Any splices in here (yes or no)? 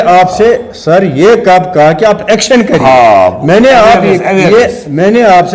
no